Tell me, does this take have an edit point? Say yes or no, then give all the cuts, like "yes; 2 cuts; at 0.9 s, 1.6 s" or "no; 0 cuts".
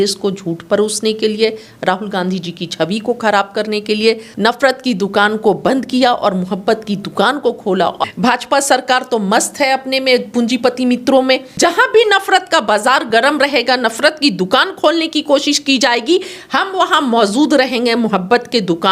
yes; 3 cuts; at 4.3 s, 8.0 s, 11.5 s